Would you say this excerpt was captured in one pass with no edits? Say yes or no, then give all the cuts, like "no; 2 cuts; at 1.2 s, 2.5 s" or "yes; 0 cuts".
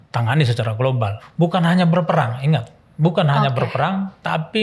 no; 1 cut; at 1.2 s